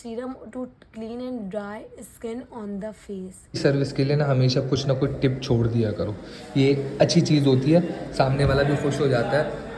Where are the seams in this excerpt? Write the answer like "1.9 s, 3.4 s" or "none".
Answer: 3.6 s